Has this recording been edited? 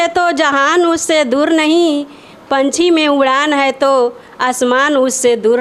no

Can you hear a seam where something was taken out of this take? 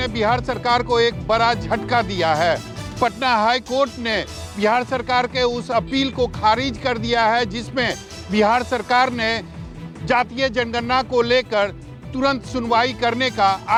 no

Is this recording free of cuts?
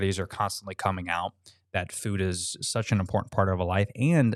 yes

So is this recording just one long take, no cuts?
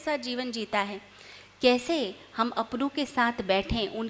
yes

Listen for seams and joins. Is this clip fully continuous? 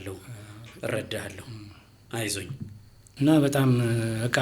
no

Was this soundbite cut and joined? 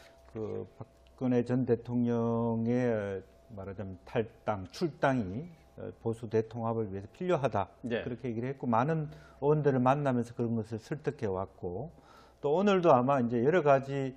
no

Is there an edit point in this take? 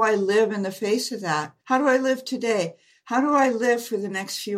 yes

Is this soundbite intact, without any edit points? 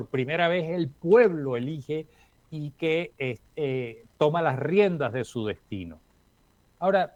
yes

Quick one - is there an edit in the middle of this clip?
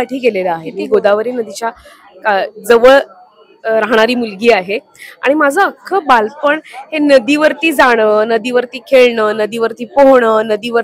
no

